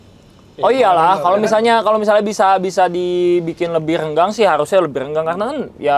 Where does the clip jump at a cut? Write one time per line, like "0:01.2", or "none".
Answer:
none